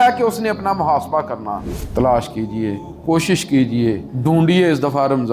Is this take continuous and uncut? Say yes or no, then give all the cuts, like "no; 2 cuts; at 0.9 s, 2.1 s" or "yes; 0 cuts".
no; 3 cuts; at 1.6 s, 2.9 s, 4.1 s